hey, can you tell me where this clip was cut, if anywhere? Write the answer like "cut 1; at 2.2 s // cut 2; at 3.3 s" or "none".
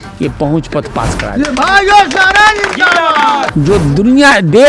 cut 1; at 3.5 s

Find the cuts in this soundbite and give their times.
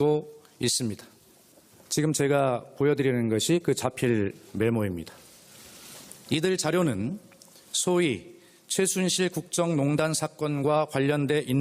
cut 1; at 1.7 s

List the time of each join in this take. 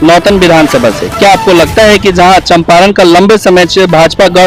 none

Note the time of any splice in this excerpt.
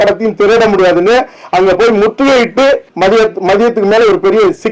cut 1; at 2.9 s

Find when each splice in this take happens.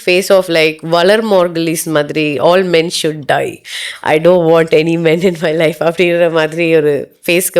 none

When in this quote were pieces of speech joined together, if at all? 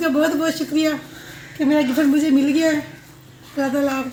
none

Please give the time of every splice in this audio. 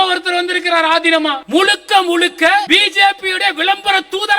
cut 1; at 1.4 s // cut 2; at 2.7 s

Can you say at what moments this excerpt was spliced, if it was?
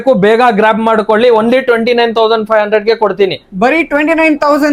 none

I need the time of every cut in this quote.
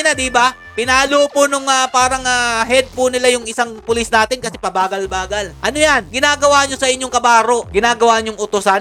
none

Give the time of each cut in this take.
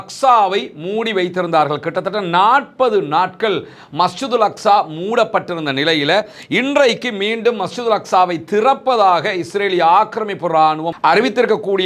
none

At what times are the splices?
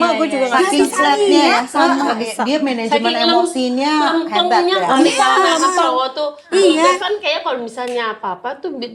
none

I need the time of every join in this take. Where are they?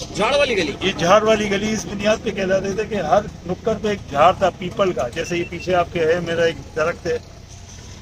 none

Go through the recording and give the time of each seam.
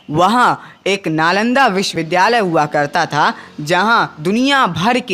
cut 1; at 1.9 s

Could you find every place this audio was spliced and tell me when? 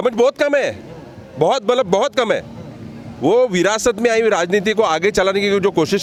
none

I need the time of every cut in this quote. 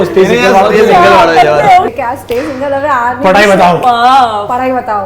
cut 1; at 1.9 s

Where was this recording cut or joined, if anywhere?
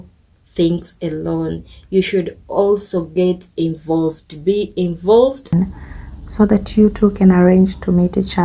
cut 1; at 5.5 s

